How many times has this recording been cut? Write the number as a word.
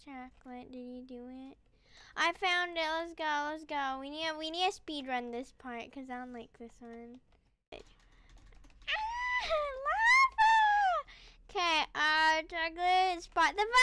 one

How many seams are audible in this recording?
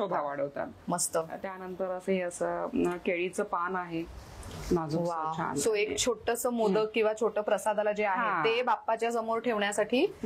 zero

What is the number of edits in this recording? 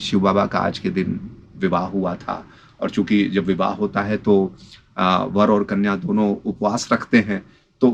zero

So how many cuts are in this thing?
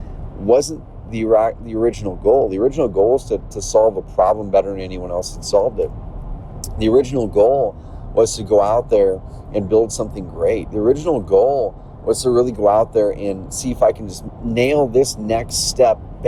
zero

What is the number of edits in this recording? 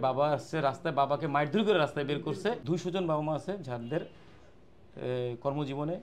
one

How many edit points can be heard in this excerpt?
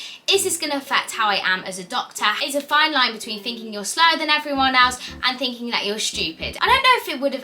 two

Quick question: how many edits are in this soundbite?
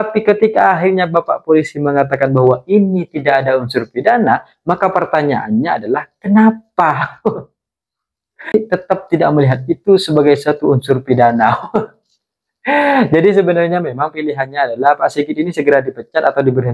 one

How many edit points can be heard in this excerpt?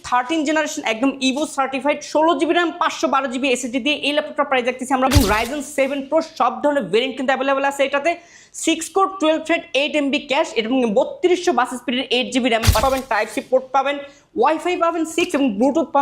two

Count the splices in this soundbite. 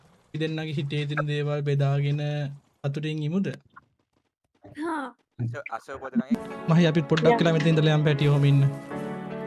one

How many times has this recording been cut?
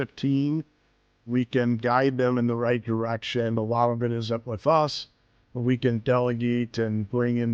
one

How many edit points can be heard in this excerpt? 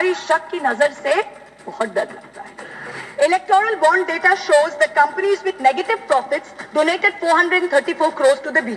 one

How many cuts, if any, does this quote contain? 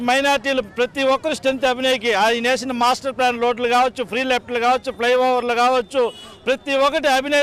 zero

